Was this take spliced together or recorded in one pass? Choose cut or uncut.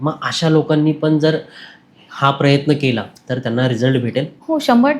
uncut